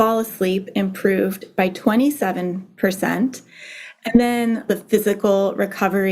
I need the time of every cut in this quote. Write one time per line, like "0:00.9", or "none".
0:04.7